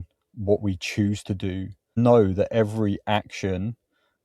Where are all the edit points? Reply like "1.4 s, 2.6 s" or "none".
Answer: 2.0 s